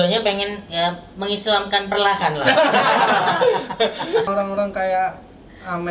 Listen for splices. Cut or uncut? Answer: cut